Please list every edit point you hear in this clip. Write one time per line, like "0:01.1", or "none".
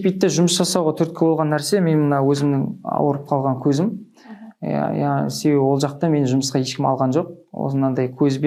none